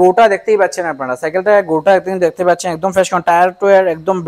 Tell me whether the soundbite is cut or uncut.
uncut